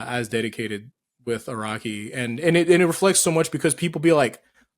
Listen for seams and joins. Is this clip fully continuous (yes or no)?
yes